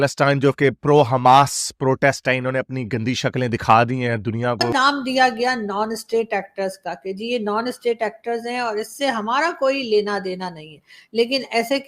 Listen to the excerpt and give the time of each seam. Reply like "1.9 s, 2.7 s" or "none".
4.7 s